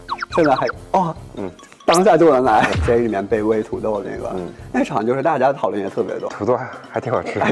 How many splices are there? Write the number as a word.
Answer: two